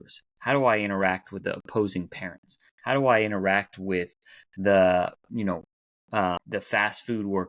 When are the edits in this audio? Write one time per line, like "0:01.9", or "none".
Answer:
0:06.4